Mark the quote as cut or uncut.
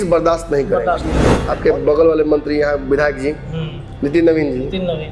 cut